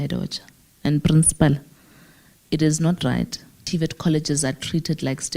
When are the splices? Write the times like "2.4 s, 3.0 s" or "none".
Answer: 3.6 s